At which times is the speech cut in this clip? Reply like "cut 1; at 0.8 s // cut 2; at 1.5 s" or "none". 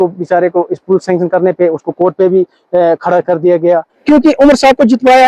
cut 1; at 3.9 s